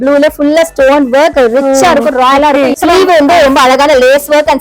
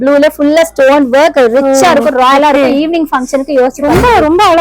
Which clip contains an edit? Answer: first; 1 cut; at 2.7 s

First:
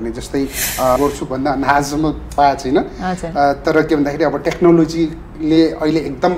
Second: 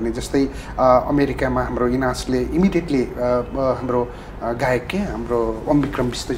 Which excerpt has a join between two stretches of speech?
first; 1 cut; at 1.0 s

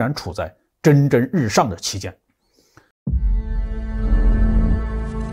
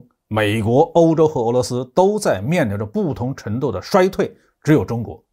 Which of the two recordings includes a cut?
first; 1 cut; at 2.9 s

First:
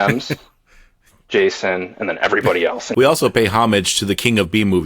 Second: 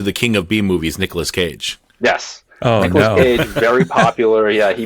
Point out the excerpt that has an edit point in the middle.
first; 1 cut; at 2.9 s

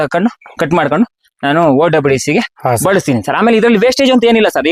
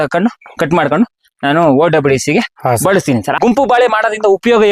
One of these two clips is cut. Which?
second; 1 cut; at 3.4 s

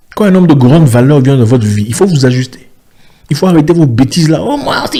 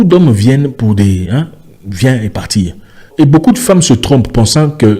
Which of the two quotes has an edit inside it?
second; 1 cut; at 3.1 s

